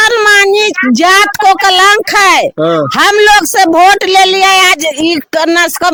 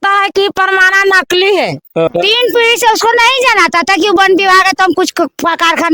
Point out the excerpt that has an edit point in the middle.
second; 1 cut; at 2.1 s

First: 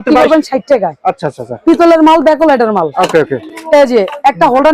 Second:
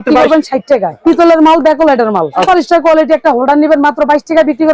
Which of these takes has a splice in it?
second; 2 cuts; at 0.9 s, 2.4 s

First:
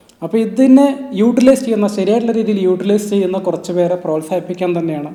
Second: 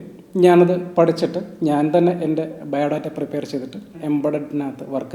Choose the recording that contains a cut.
second; 1 cut; at 3.9 s

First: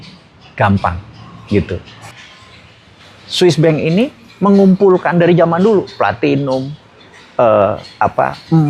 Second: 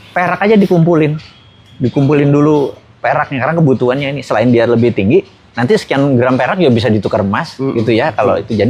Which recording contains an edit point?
first; 1 cut; at 2.1 s

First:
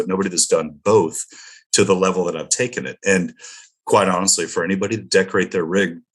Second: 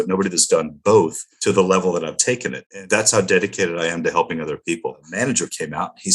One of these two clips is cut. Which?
second; 3 cuts; at 1.3 s, 2.6 s, 5.1 s

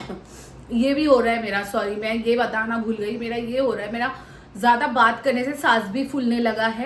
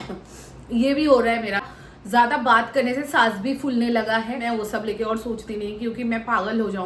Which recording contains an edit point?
second; 2 cuts; at 1.6 s, 4.4 s

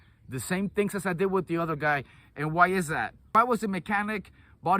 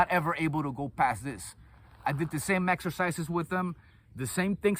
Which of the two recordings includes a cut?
first; 1 cut; at 3.3 s

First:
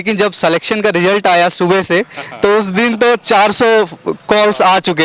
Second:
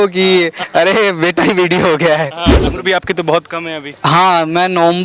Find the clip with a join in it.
second; 1 cut; at 2.6 s

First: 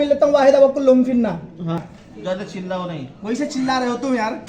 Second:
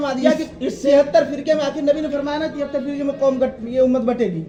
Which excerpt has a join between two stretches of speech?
first; 1 cut; at 1.8 s

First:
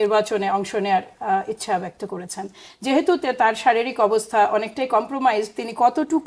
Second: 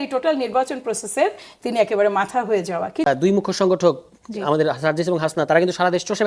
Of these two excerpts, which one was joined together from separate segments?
second; 1 cut; at 3.0 s

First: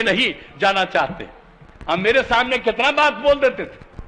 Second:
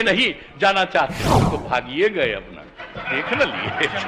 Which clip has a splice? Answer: second; 1 cut; at 1.4 s

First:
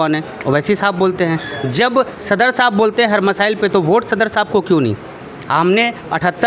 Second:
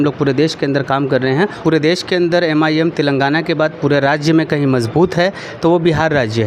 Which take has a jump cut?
second; 1 cut; at 1.6 s

